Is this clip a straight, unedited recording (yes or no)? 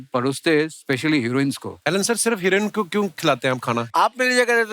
no